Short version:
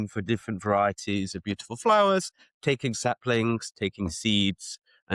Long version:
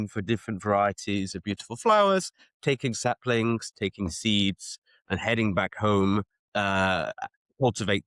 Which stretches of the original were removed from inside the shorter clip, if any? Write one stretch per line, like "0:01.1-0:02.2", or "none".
none